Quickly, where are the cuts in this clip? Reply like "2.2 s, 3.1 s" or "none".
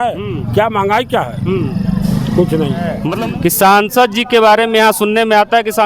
3.0 s